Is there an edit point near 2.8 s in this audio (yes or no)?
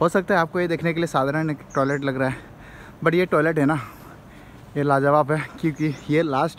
no